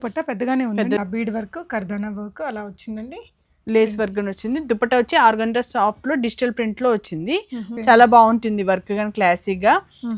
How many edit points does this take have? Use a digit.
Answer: 2